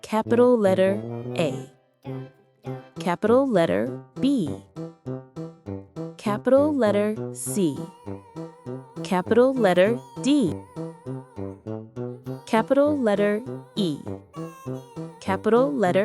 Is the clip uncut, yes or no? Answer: no